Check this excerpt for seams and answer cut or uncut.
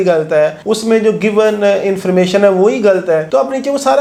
uncut